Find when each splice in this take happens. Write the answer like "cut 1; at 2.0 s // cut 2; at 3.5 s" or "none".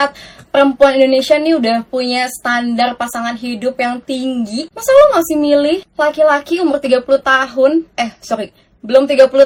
none